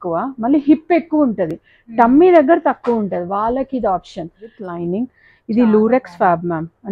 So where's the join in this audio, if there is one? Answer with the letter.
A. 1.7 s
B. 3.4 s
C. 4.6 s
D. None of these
C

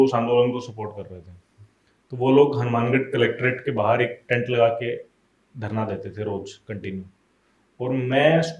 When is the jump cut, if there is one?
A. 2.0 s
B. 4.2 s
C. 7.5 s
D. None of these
D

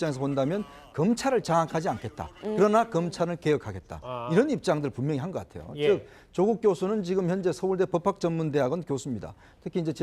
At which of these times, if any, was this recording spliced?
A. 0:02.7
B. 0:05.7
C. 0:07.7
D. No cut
B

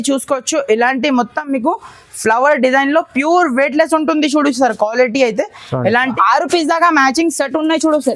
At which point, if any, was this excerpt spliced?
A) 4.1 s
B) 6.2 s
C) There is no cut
B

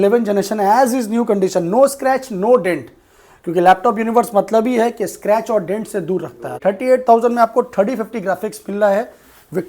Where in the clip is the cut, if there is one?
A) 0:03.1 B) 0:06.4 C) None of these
B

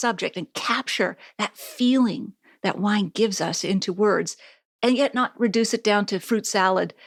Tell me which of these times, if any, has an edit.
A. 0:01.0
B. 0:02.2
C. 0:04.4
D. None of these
D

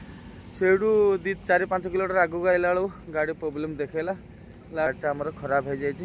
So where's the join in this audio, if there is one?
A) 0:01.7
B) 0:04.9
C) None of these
B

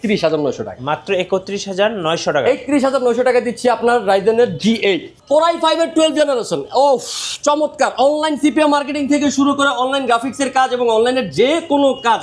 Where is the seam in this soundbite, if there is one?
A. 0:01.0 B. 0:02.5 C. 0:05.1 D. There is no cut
C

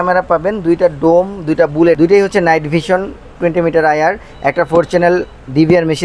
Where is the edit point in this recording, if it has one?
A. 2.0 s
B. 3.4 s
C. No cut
A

